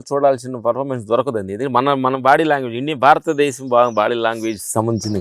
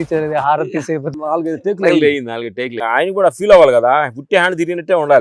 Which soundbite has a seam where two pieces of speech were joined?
second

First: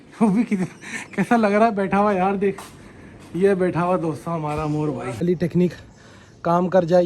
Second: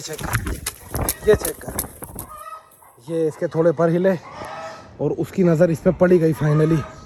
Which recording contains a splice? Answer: first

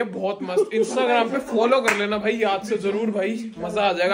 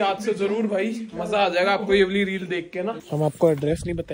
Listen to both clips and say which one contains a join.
second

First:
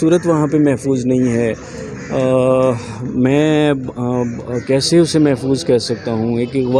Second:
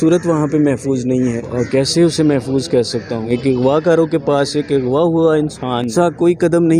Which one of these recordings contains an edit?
second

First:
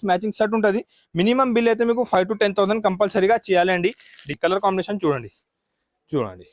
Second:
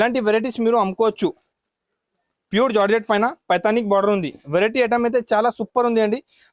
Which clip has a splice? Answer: first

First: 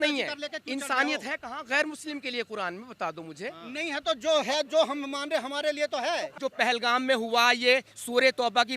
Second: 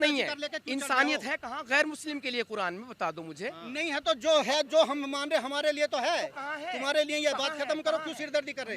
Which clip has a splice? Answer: first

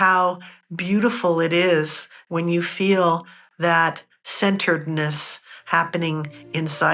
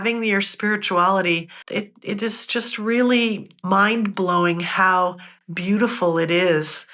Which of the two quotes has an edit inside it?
second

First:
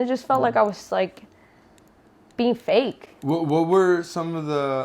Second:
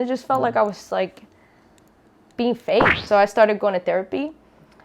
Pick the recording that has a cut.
second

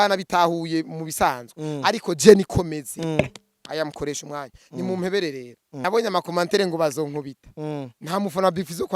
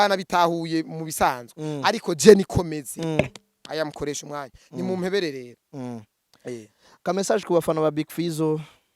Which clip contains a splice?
first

